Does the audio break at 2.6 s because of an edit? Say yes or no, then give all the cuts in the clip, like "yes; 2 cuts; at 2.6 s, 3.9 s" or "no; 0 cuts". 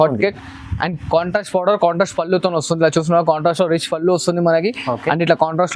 no; 0 cuts